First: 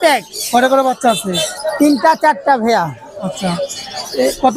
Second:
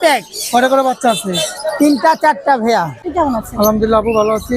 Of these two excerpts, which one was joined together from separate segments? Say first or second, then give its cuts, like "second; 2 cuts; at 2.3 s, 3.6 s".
second; 1 cut; at 3.0 s